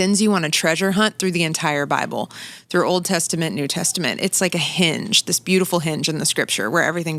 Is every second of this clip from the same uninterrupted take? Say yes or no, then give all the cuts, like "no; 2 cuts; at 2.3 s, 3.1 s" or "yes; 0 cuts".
yes; 0 cuts